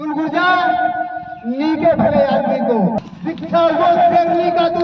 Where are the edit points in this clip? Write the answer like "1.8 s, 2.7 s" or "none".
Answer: 3.0 s